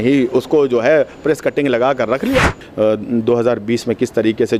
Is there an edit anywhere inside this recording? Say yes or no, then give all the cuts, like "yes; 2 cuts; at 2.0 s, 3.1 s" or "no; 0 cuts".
yes; 1 cut; at 2.6 s